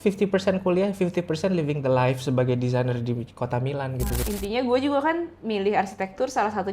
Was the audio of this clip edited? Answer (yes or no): yes